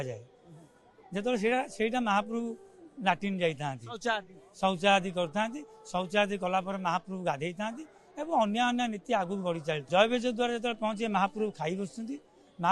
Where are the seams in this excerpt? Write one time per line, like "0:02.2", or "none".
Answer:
0:09.8

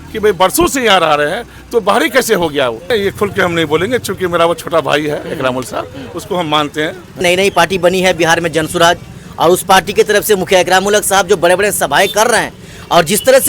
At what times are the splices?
0:02.8
0:07.2

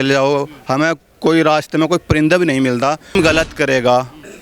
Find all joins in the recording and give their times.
0:03.1

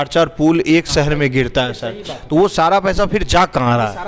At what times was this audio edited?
none

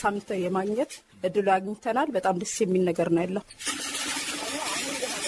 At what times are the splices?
0:01.0

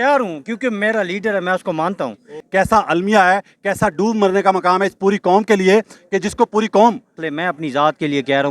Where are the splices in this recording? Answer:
0:02.4
0:07.2

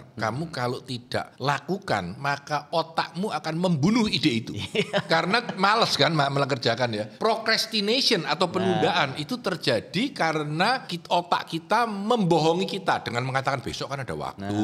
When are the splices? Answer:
0:01.3
0:07.1
0:10.9

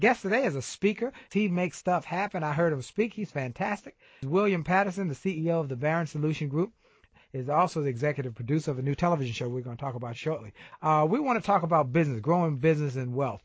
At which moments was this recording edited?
0:01.3
0:04.2
0:07.0
0:10.7

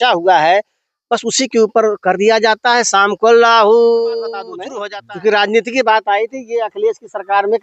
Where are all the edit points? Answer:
0:04.6

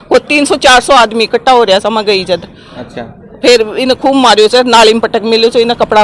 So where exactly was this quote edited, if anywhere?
none

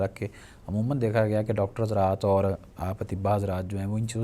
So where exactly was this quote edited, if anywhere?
none

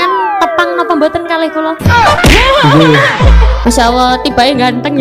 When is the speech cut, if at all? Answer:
none

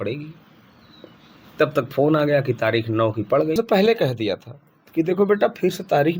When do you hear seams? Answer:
0:03.6

